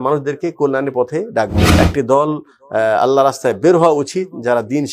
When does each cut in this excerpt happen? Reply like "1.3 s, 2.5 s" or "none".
1.6 s

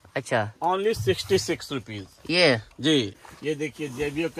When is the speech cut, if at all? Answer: 3.3 s

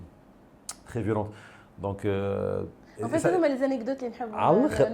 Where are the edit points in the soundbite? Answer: none

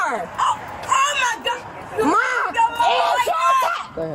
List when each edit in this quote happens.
none

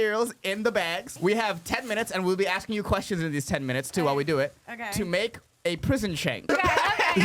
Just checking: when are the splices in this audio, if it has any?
1.1 s, 6.5 s

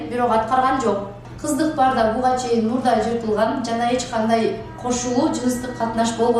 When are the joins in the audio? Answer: 1.2 s

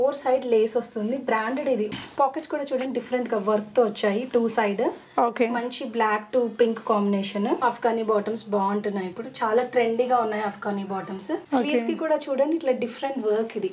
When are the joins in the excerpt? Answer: 1.9 s, 7.6 s, 11.4 s

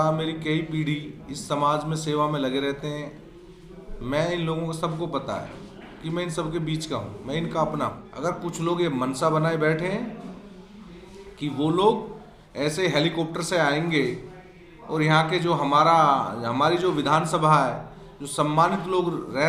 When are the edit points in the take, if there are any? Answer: 8.1 s

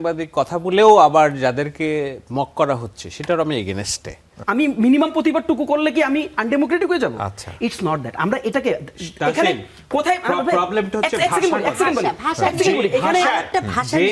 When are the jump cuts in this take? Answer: 4.4 s

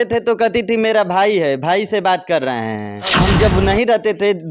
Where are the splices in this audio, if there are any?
3.2 s

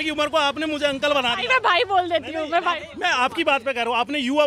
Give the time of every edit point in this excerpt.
none

